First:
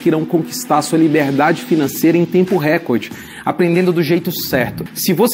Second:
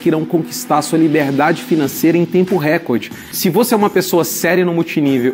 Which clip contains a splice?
second; 1 cut; at 3.2 s

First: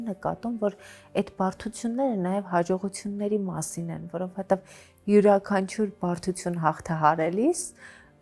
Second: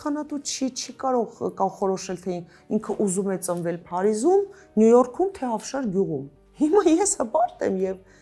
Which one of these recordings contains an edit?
second; 1 cut; at 6.4 s

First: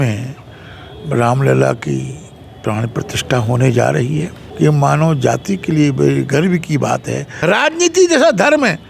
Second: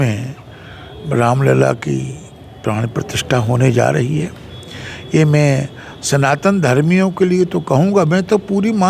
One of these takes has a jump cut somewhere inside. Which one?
first; 2 cuts; at 4.4 s, 7.3 s

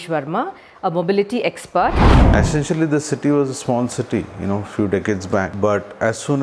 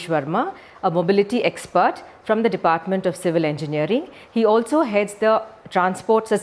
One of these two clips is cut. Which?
first; 2 cuts; at 2.1 s, 5.5 s

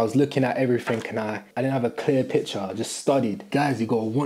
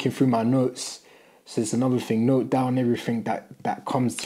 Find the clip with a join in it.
first; 2 cuts; at 1.5 s, 3.5 s

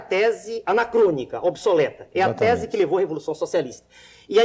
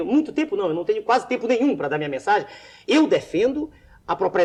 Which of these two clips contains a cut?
first; 1 cut; at 1.6 s

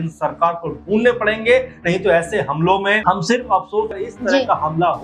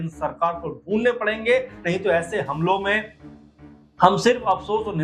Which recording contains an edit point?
first; 2 cuts; at 3.0 s, 4.0 s

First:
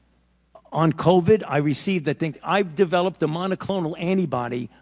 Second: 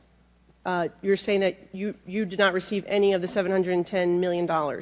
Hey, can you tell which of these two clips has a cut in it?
first; 1 cut; at 2.4 s

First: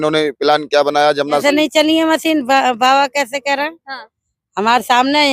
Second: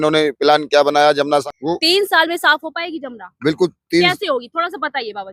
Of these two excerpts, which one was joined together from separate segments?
first; 1 cut; at 1.4 s

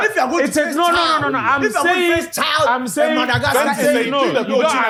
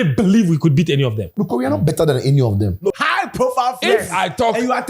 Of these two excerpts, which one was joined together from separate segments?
second; 2 cuts; at 1.2 s, 2.9 s

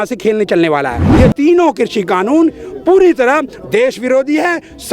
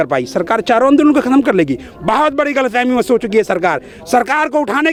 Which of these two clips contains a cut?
first; 1 cut; at 1.0 s

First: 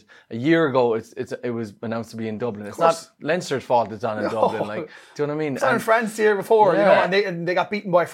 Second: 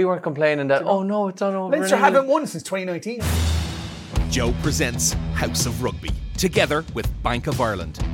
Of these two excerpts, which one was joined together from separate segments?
second; 1 cut; at 3.2 s

